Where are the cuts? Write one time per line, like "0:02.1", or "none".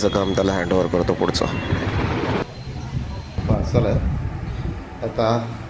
0:02.8